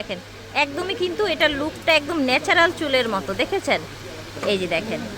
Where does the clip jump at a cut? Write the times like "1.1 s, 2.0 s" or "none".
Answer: none